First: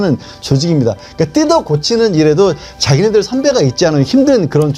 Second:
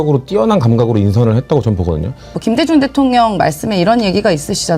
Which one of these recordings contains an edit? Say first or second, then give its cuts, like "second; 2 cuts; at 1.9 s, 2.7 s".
second; 1 cut; at 2.4 s